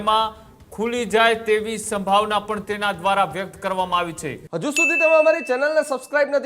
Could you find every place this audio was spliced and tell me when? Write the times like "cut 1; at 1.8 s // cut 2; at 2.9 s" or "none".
cut 1; at 4.3 s